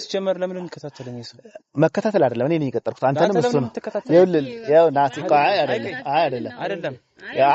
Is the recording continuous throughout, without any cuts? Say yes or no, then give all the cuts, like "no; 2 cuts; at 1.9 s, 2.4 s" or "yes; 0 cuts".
yes; 0 cuts